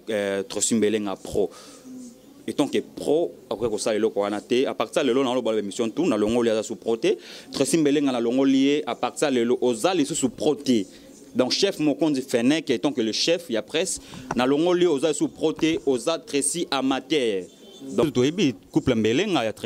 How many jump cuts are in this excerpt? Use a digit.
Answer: 1